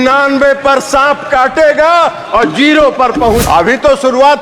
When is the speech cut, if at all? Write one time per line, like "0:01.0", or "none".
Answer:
0:03.4